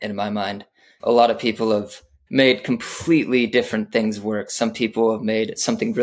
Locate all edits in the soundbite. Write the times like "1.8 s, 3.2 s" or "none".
0.9 s, 2.1 s